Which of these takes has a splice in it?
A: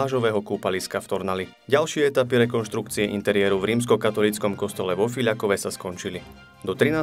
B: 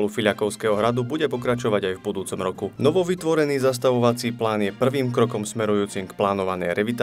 B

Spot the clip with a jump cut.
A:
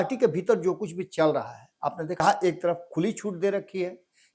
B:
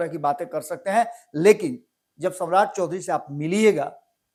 A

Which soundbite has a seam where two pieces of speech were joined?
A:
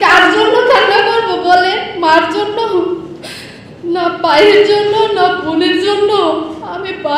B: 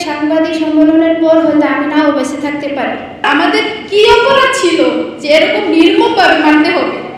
B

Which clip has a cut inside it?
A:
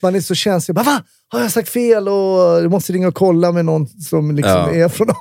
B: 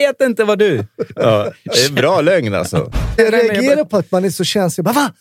B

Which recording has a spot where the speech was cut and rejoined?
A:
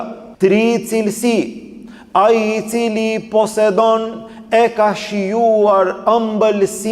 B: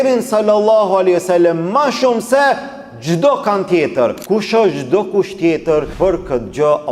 B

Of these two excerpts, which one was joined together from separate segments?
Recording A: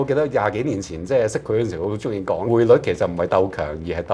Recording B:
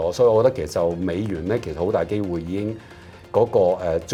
A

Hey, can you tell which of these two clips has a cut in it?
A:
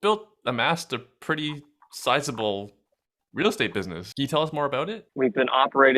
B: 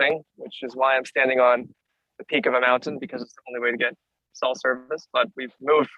A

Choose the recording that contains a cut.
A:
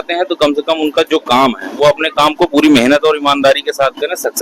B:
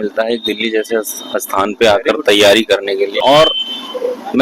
B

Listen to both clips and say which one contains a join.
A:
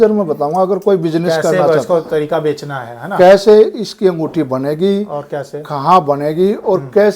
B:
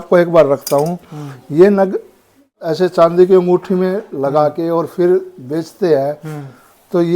B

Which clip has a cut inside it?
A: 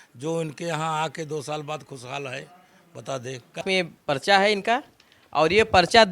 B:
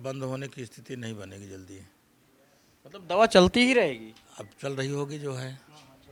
A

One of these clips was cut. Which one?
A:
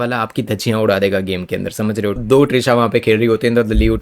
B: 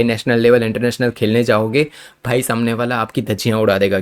A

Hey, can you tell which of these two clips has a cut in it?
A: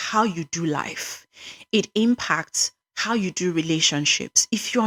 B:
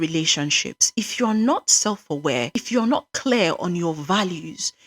B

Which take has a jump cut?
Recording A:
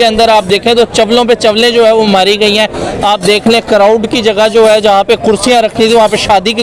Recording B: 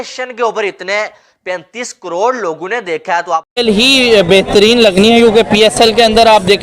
B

